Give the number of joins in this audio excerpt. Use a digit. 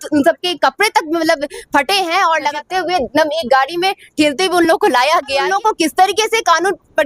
2